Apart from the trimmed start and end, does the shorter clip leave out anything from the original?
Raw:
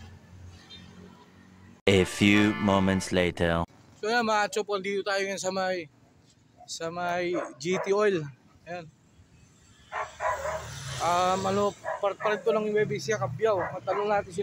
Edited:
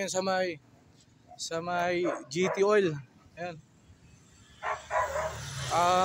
no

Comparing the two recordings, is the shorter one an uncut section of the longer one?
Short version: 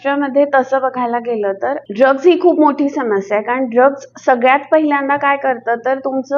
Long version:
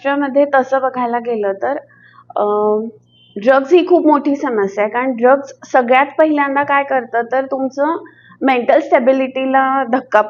no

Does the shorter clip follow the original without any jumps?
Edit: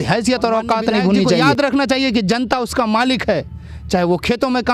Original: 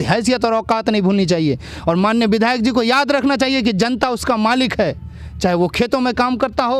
no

